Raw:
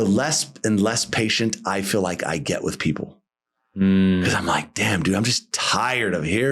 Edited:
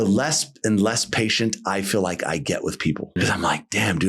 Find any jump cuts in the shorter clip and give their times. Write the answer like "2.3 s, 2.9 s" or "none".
3.2 s

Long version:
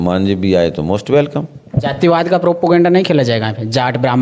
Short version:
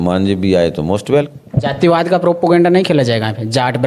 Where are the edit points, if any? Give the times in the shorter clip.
1.4 s

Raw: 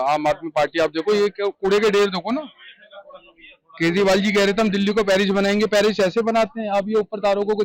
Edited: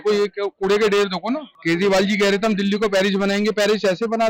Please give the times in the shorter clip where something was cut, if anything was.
1.5 s

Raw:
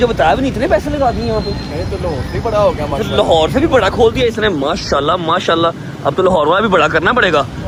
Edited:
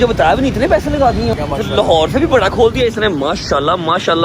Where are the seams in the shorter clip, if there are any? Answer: 1.3 s

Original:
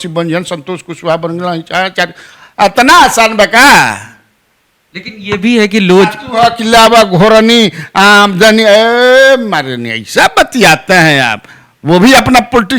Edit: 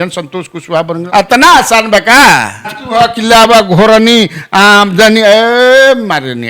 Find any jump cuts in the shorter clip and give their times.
1.0 s, 2.8 s

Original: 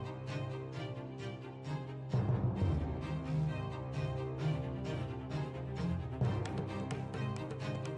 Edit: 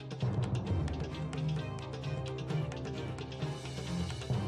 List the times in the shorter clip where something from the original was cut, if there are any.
none

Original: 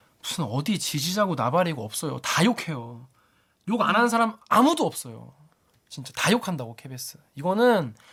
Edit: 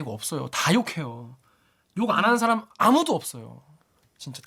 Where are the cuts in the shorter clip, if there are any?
none

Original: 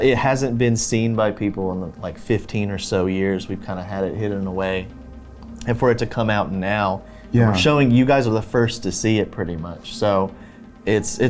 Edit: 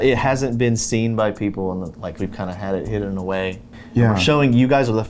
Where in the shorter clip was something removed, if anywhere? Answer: 2.2 s, 3.8 s

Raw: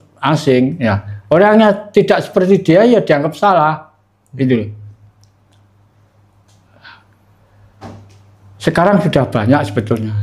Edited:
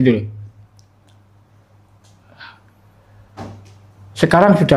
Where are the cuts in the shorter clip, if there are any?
none

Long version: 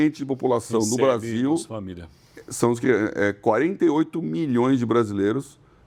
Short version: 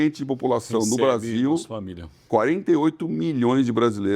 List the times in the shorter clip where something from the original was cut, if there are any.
2.2 s

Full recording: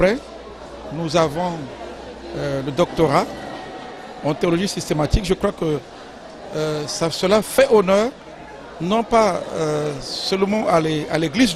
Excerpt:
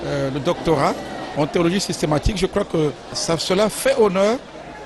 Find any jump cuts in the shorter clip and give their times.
1.2 s, 3.1 s

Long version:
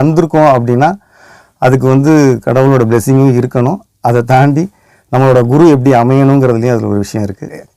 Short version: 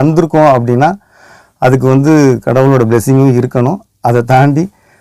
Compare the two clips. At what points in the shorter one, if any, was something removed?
none

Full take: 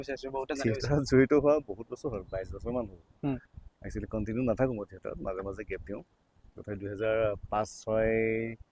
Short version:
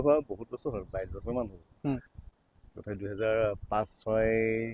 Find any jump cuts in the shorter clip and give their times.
2.4 s

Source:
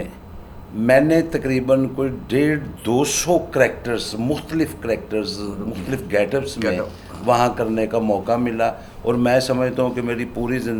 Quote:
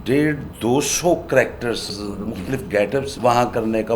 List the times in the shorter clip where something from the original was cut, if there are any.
1.9 s, 3.1 s

